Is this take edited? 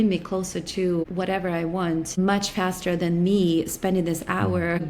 no; 0 cuts

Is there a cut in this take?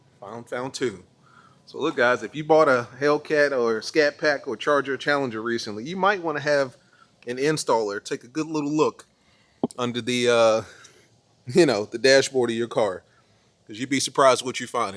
no; 0 cuts

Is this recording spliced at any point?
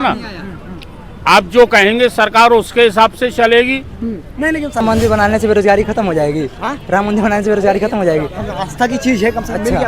yes; 1 cut; at 4.8 s

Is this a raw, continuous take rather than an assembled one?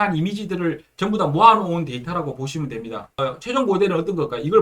no; 1 cut; at 3.2 s

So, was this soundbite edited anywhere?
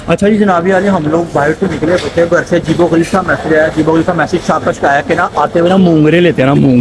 no; 0 cuts

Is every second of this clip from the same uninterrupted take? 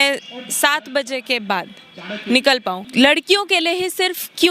no; 1 cut; at 2.8 s

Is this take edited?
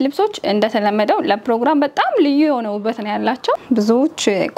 yes; 1 cut; at 3.6 s

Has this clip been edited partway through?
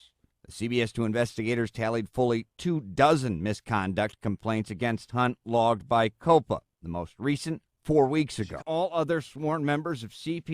yes; 1 cut; at 8.6 s

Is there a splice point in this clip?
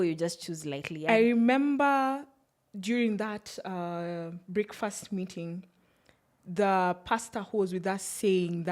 yes; 1 cut; at 0.9 s

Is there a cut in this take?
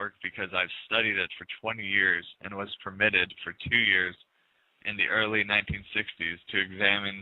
yes; 1 cut; at 4.6 s

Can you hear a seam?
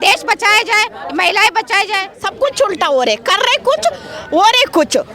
yes; 1 cut; at 2.2 s

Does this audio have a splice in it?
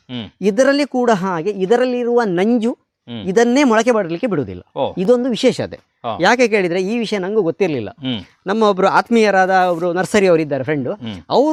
no; 0 cuts

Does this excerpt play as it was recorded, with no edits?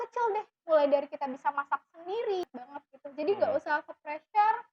no; 1 cut; at 2.6 s

